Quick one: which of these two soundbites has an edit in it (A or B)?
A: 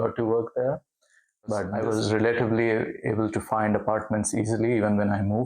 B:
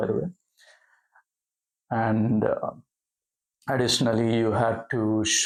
A